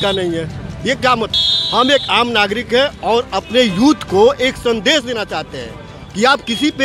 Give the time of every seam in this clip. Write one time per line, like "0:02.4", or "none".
0:01.4